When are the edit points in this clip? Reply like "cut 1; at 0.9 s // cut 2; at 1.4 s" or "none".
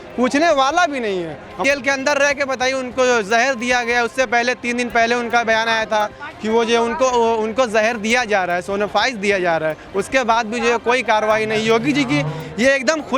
cut 1; at 1.6 s